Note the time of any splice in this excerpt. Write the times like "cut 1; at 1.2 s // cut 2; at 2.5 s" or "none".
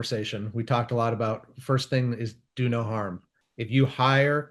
cut 1; at 3.3 s